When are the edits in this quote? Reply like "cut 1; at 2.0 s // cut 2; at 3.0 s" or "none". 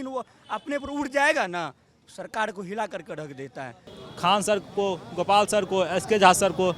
cut 1; at 3.9 s